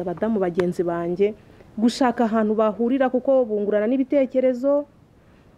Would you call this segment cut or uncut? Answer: uncut